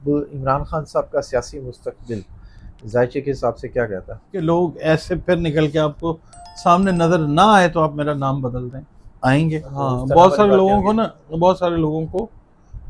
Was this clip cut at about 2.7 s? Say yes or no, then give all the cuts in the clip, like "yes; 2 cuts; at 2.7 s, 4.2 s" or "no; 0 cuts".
no; 2 cuts; at 4.3 s, 9.7 s